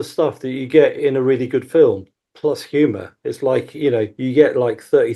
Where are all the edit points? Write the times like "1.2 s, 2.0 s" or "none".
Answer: none